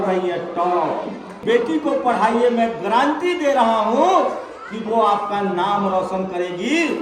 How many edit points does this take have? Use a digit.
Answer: 1